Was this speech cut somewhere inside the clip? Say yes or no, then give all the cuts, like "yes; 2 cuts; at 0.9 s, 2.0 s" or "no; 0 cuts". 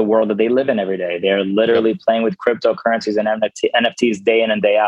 no; 0 cuts